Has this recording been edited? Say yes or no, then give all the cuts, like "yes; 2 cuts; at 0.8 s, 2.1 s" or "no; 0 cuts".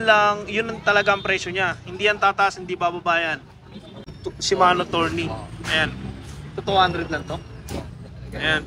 yes; 1 cut; at 4.1 s